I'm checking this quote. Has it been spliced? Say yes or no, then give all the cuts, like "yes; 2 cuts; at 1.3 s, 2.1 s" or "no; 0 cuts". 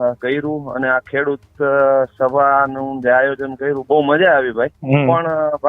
yes; 1 cut; at 4.8 s